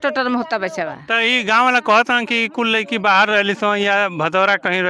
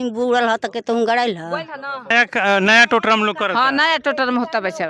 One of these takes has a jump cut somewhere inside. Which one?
second; 1 cut; at 2.1 s

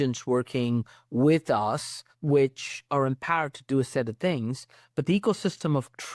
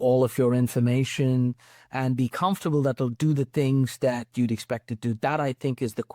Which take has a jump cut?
first; 1 cut; at 2.1 s

